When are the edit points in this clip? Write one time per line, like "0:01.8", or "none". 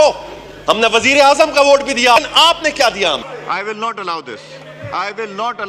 0:02.2